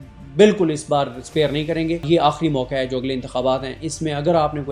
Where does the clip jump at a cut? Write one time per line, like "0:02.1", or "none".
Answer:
0:02.0